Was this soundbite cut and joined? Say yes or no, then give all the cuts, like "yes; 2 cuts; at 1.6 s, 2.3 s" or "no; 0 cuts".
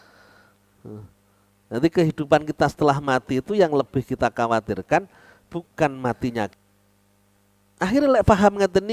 yes; 1 cut; at 6.5 s